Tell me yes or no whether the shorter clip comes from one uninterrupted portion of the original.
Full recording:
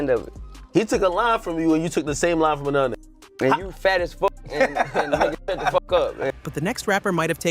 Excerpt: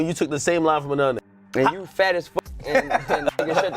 no